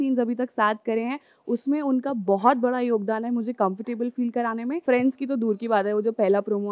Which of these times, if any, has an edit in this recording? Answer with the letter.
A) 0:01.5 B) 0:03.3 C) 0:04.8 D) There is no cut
C